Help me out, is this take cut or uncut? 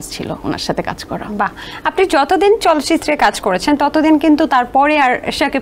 uncut